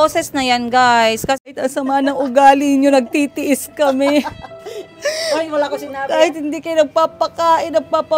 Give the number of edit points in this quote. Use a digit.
1